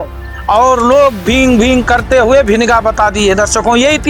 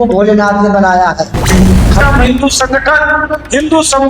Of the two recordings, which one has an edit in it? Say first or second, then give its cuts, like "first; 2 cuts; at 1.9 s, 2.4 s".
second; 1 cut; at 2.0 s